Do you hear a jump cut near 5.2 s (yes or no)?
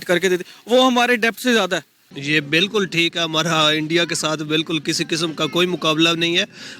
no